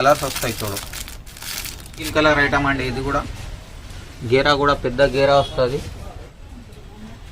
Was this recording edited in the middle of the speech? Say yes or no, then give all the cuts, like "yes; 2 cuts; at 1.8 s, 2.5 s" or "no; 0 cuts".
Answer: yes; 1 cut; at 2.1 s